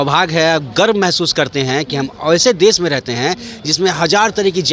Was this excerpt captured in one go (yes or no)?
yes